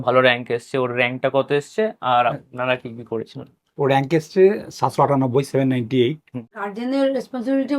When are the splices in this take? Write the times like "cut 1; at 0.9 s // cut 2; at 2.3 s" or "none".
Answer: cut 1; at 6.4 s